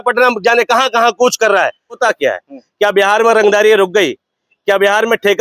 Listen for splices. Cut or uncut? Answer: cut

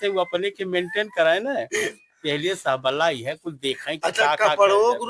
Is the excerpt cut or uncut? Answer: uncut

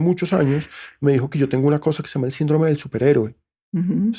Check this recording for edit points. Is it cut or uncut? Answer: uncut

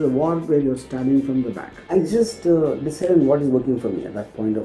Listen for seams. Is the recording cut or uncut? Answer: cut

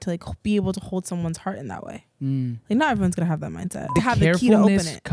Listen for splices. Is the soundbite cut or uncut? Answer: cut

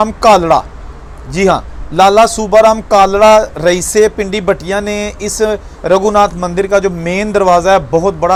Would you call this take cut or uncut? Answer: uncut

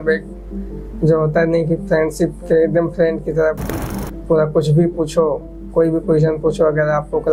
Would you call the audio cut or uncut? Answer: uncut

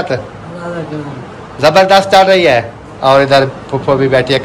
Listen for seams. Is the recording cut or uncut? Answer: cut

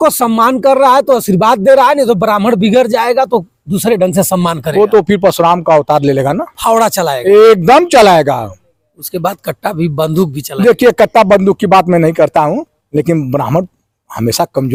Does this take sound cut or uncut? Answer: uncut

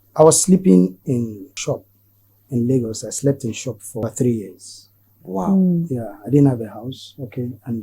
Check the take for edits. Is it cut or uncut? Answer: cut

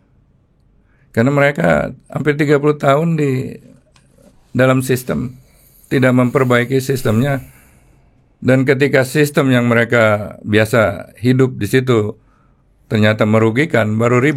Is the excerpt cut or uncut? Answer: uncut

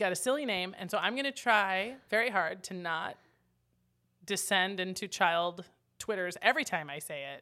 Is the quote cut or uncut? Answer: uncut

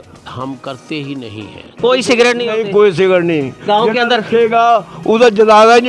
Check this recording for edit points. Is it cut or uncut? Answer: cut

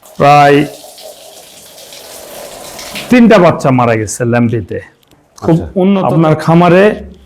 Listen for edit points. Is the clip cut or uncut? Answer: cut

